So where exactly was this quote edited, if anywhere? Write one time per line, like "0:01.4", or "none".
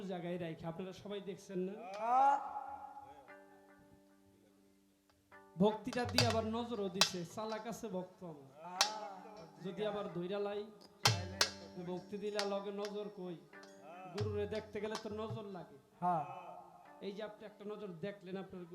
none

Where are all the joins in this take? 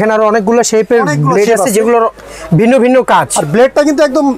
none

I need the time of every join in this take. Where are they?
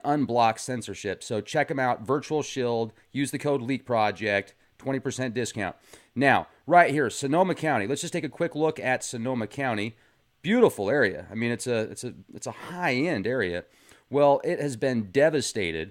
none

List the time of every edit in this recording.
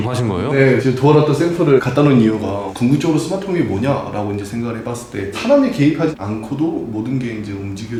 none

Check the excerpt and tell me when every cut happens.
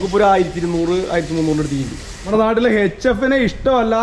0:02.3

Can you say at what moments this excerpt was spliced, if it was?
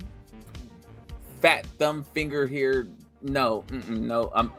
none

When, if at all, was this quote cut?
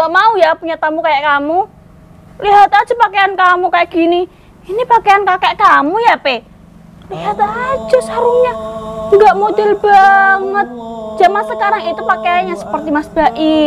none

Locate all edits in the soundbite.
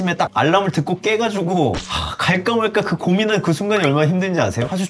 none

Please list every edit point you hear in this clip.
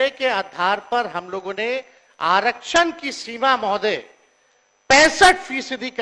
none

